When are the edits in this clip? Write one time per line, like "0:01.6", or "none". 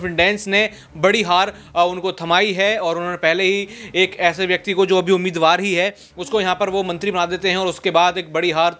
none